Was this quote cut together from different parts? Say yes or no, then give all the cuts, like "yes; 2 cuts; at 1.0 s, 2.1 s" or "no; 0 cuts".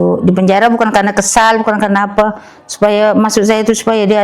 no; 0 cuts